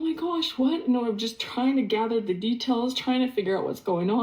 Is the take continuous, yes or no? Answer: yes